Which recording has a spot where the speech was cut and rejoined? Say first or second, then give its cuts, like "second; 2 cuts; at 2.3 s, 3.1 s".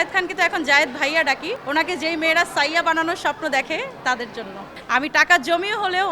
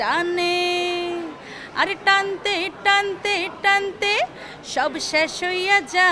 first; 2 cuts; at 1.6 s, 4.7 s